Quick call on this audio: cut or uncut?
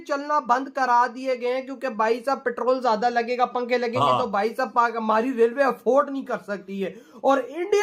uncut